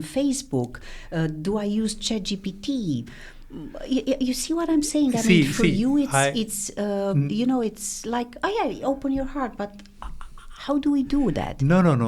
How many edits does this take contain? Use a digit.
0